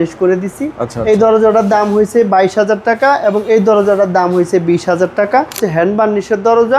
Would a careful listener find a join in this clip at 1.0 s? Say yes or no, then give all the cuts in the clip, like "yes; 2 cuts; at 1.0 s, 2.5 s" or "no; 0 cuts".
no; 1 cut; at 5.6 s